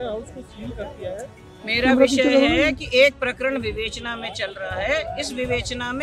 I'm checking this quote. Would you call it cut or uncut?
uncut